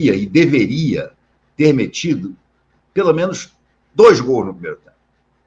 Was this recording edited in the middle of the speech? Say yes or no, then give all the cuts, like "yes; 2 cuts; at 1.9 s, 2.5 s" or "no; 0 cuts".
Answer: no; 0 cuts